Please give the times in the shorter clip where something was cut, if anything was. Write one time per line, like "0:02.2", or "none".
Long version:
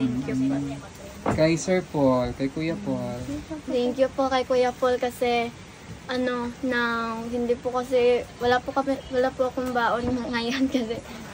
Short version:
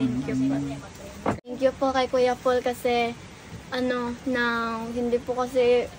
0:01.4